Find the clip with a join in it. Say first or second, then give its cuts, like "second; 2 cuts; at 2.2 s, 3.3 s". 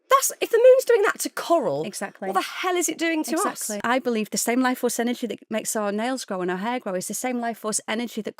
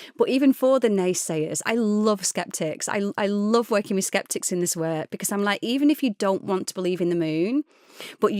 first; 1 cut; at 3.8 s